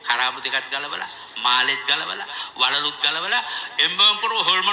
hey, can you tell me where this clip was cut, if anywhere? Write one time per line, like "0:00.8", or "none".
none